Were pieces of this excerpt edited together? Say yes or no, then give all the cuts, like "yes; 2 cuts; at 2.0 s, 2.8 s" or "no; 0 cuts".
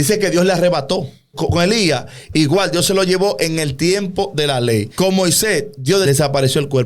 yes; 3 cuts; at 1.3 s, 4.9 s, 6.0 s